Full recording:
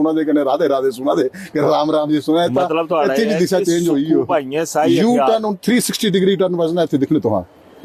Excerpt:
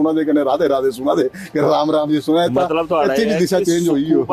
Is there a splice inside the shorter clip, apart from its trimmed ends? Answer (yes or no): no